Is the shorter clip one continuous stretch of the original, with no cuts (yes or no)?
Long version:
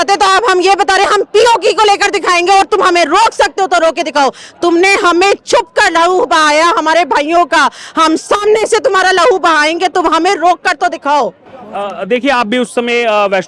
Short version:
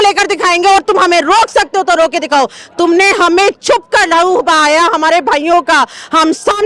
yes